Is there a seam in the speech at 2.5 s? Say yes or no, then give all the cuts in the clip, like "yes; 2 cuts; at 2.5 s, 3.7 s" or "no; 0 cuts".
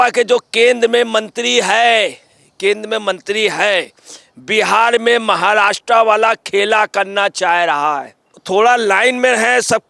no; 1 cut; at 8.4 s